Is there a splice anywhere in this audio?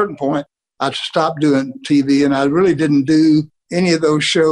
no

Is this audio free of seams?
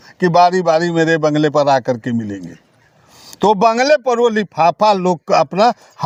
yes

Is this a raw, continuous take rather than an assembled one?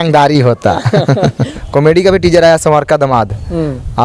no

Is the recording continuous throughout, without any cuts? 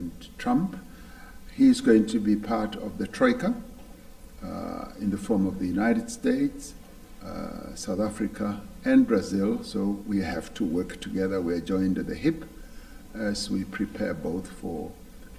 yes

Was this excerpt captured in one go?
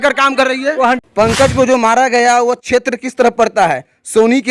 no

